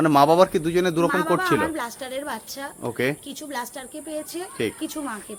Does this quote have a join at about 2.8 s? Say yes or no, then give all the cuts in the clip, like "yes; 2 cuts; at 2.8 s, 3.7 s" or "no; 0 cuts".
no; 0 cuts